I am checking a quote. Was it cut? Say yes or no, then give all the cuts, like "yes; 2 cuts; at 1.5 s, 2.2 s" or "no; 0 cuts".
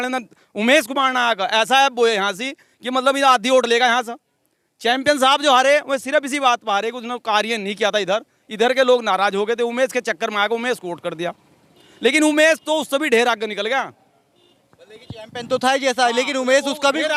no; 0 cuts